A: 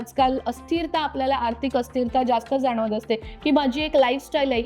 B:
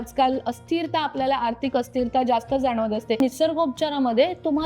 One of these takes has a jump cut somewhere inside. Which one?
B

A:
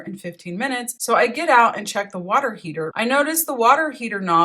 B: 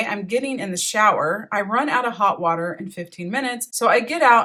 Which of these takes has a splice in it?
A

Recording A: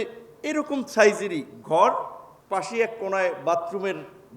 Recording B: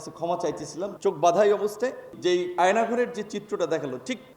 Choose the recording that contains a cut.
B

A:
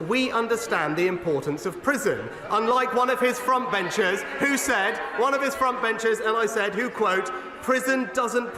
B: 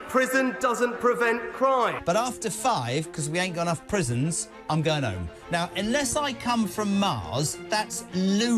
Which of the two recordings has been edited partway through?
B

